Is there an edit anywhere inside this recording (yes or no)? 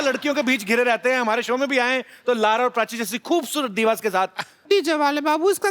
yes